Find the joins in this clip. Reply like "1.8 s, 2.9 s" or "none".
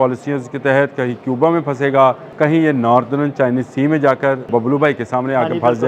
2.3 s, 4.4 s